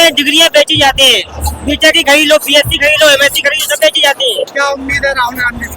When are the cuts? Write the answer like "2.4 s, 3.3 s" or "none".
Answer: 4.5 s